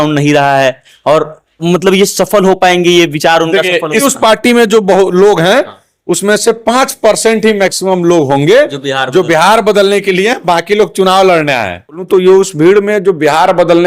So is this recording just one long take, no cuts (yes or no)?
no